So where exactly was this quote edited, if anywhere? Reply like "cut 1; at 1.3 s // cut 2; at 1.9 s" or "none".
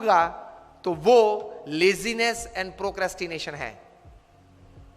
cut 1; at 3.9 s